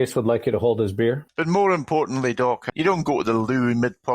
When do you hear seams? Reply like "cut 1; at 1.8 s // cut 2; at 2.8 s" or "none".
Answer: cut 1; at 1.3 s // cut 2; at 2.7 s